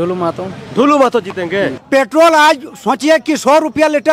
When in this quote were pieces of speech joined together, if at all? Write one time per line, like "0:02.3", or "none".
0:01.8